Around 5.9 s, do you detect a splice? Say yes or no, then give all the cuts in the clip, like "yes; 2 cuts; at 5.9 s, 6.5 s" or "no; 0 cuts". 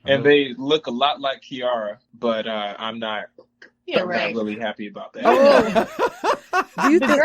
no; 1 cut; at 2.0 s